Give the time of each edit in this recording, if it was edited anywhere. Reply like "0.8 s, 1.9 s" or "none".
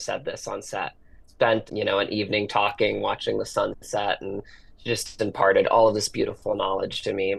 none